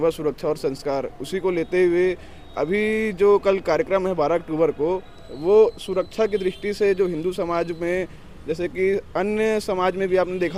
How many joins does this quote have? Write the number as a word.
zero